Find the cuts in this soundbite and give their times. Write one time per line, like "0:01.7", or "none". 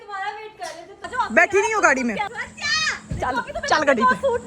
0:01.1
0:02.3